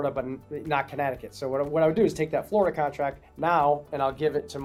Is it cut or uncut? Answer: uncut